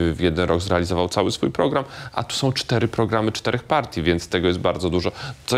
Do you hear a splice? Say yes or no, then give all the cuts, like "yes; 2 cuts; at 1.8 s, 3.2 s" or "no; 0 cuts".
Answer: no; 0 cuts